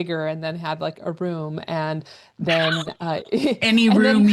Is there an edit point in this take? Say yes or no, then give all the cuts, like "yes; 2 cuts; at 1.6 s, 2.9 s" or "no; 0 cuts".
no; 0 cuts